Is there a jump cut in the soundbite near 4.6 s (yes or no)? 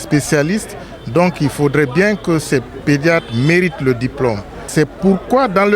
yes